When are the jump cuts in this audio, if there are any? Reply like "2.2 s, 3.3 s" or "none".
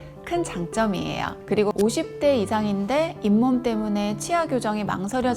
1.5 s